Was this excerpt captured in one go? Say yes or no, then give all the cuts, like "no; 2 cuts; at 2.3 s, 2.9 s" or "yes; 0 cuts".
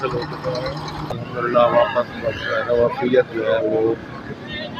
no; 1 cut; at 1.2 s